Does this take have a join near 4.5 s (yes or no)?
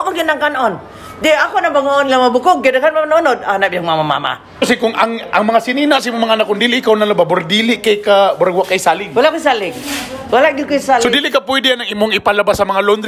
yes